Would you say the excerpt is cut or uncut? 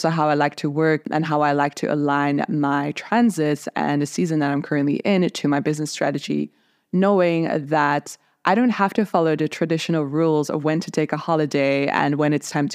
cut